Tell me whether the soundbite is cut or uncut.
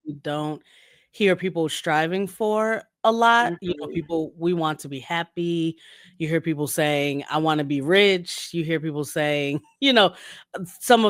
uncut